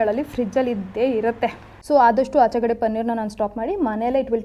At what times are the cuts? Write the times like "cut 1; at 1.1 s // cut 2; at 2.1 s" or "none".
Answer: cut 1; at 1.7 s

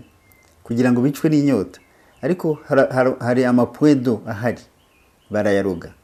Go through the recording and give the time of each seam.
none

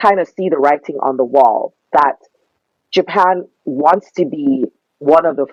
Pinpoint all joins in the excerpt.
none

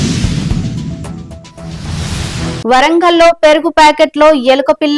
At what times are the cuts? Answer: cut 1; at 2.6 s

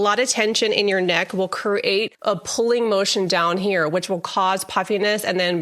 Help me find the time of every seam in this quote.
cut 1; at 2.1 s

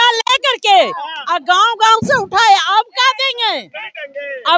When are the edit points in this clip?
none

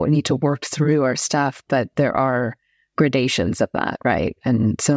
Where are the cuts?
none

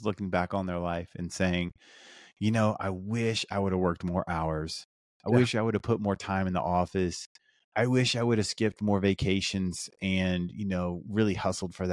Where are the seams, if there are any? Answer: none

